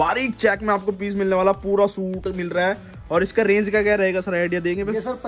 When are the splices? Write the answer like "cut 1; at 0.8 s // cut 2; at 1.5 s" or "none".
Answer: none